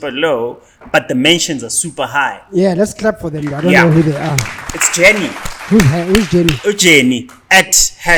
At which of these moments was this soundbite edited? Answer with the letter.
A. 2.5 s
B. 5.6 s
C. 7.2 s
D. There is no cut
D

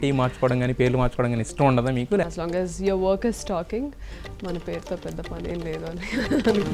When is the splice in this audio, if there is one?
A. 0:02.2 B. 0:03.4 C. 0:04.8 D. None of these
A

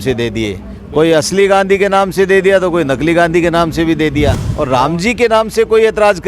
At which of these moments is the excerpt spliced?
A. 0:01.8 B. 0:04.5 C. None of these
B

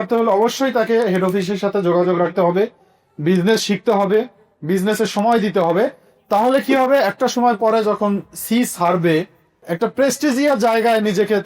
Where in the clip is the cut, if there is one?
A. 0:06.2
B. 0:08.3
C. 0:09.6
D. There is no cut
C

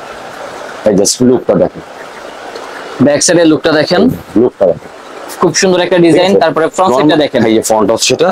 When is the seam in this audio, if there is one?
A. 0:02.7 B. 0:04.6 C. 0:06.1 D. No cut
D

